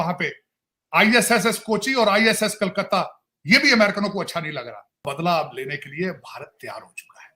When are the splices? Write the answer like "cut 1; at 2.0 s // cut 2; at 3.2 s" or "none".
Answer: cut 1; at 5.1 s